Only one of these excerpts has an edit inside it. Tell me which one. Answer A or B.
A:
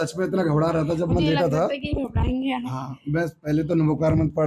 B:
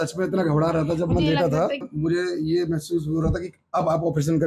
B